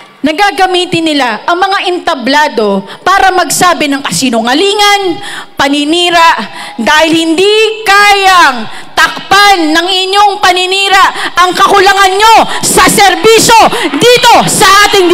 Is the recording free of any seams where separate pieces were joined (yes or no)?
yes